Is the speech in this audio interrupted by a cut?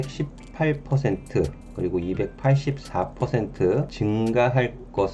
yes; 1 cut; at 3.9 s

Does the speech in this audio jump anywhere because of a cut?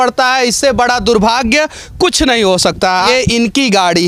no; 0 cuts

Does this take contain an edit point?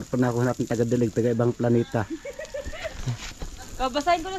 no; 0 cuts

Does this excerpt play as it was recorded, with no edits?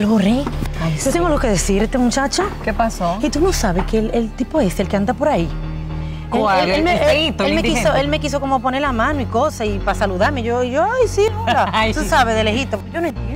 yes; 0 cuts

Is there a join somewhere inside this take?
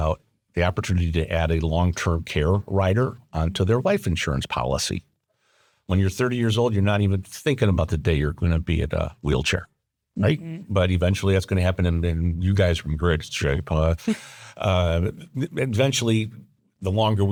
no; 0 cuts

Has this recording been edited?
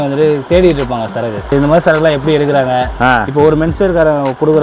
yes; 1 cut; at 1.5 s

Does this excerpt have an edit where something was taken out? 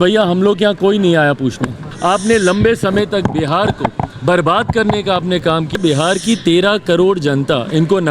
yes; 2 cuts; at 1.9 s, 5.8 s

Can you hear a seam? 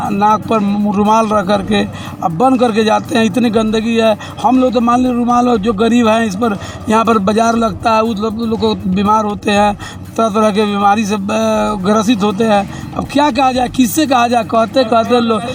no; 0 cuts

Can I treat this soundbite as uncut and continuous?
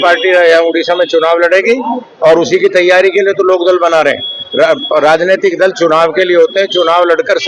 yes; 0 cuts

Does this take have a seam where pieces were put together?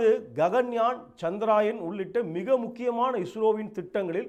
no; 0 cuts

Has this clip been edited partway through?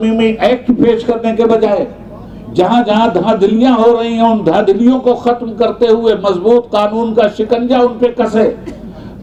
no; 0 cuts

